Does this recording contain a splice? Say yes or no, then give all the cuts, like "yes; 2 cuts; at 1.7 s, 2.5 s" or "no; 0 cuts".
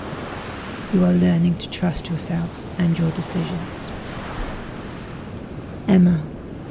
yes; 2 cuts; at 3.7 s, 5.3 s